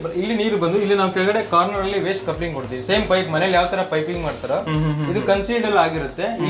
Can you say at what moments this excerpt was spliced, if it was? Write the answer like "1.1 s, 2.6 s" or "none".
none